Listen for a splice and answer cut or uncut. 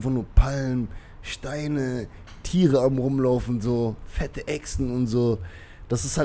uncut